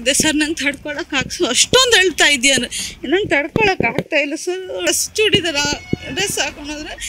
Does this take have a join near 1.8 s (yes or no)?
no